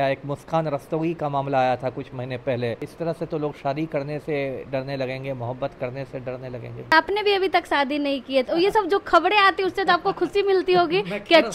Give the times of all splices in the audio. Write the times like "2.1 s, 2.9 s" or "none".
2.9 s, 6.9 s